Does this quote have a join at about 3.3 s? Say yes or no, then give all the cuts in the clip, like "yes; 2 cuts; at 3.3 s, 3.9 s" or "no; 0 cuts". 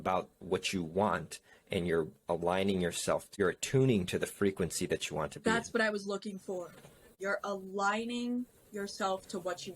yes; 2 cuts; at 3.3 s, 7.1 s